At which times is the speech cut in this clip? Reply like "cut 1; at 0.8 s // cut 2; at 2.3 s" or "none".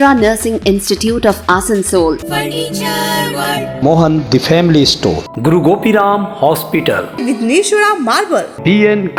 none